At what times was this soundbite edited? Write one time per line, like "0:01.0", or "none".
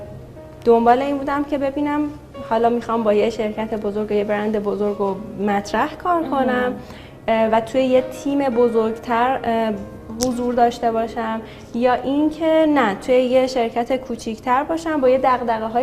none